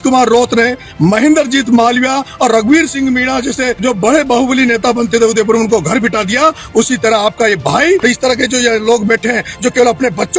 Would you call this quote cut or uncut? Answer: cut